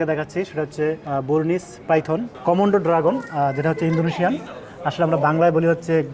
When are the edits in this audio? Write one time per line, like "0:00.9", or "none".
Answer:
0:01.0
0:02.3